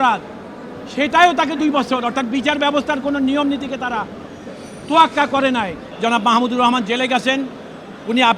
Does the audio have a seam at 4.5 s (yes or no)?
no